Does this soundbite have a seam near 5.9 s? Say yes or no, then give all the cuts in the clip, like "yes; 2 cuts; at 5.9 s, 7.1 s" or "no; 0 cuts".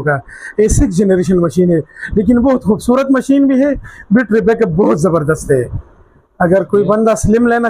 no; 0 cuts